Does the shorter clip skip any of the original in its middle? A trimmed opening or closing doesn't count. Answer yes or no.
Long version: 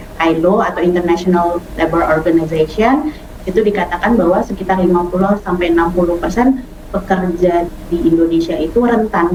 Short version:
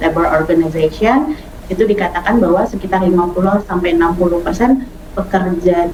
no